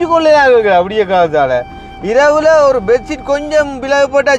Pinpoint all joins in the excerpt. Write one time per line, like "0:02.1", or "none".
none